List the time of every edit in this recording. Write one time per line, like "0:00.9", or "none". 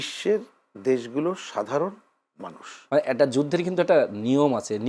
0:02.8